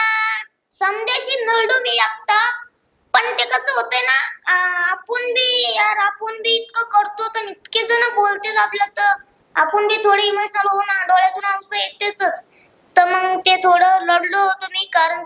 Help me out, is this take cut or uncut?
uncut